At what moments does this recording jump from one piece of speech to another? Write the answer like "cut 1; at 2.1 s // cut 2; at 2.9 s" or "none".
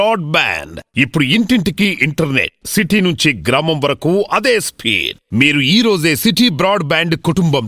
none